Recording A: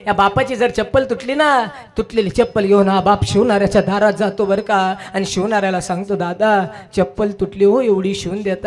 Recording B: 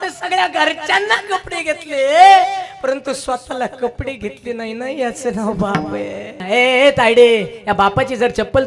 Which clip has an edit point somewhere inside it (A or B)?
B